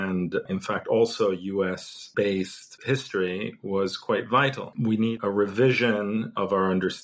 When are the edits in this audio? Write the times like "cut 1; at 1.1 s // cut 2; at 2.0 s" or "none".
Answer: cut 1; at 1.9 s // cut 2; at 2.7 s // cut 3; at 4.7 s